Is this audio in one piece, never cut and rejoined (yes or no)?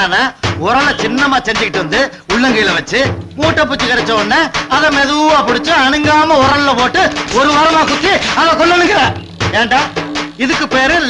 yes